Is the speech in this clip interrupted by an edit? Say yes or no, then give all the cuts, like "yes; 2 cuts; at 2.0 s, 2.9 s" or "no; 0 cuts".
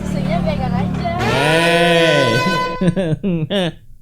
no; 0 cuts